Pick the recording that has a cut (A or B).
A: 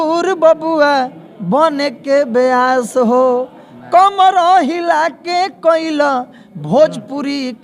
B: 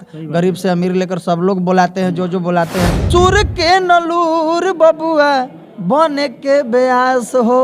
B